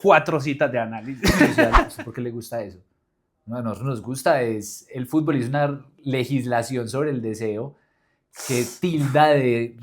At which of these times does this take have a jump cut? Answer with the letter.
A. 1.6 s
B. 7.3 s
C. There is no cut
A